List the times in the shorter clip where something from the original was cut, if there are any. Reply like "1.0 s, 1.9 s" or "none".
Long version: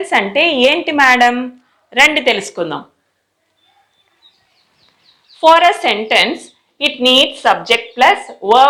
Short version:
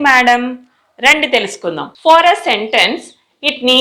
1.9 s